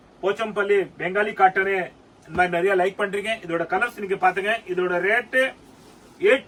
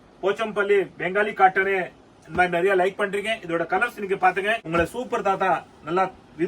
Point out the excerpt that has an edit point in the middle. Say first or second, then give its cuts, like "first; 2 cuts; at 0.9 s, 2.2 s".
second; 1 cut; at 4.6 s